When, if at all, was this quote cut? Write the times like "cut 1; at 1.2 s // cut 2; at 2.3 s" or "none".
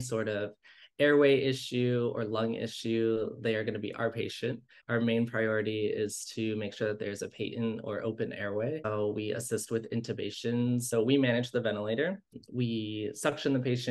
cut 1; at 4.7 s // cut 2; at 8.9 s // cut 3; at 10.9 s // cut 4; at 12.4 s